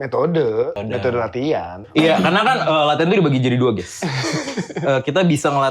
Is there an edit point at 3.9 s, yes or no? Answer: no